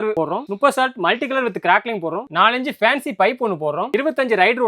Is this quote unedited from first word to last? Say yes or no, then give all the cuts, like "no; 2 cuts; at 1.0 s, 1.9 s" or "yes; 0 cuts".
yes; 0 cuts